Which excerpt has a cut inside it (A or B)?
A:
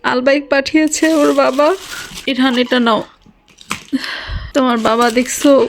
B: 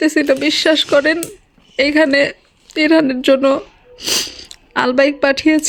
A